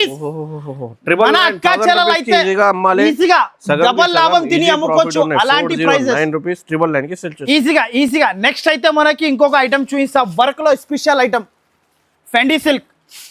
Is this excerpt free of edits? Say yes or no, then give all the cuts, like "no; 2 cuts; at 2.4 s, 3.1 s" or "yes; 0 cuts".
yes; 0 cuts